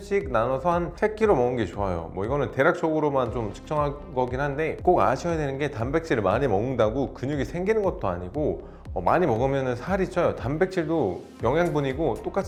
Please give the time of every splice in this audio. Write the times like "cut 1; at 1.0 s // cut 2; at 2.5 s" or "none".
none